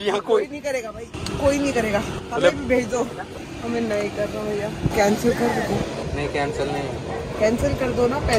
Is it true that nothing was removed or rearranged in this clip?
yes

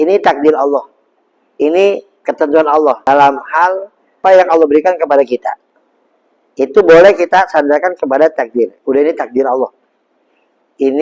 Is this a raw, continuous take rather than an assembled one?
no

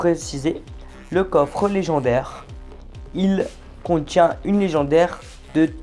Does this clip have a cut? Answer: yes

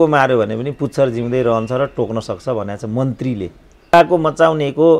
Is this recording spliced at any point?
yes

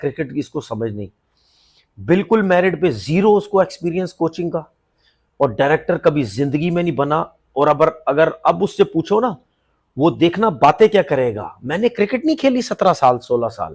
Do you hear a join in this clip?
no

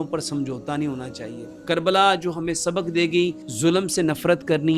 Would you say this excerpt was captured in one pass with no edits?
no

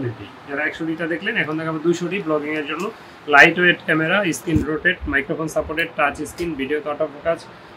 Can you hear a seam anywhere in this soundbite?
no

